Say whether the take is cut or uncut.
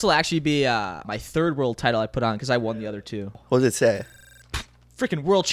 cut